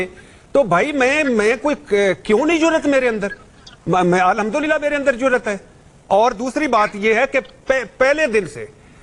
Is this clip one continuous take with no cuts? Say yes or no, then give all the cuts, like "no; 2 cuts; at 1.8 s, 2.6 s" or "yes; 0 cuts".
yes; 0 cuts